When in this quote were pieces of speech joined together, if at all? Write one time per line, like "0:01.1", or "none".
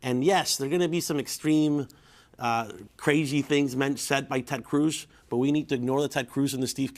0:04.9